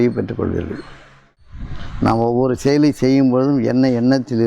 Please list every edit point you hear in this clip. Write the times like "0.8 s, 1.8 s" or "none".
1.3 s